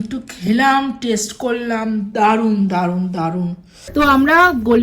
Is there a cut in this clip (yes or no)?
yes